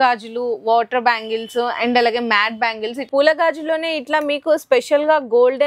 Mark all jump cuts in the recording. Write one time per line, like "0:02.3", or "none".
0:03.0